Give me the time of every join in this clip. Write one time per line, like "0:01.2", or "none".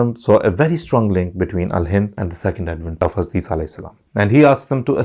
0:02.7
0:04.0